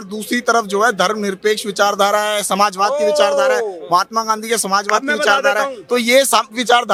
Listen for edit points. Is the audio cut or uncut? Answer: uncut